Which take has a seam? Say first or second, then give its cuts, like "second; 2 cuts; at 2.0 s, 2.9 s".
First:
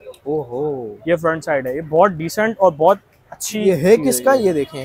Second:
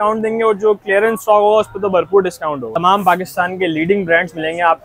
second; 1 cut; at 2.7 s